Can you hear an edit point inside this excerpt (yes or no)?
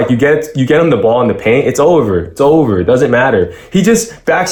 no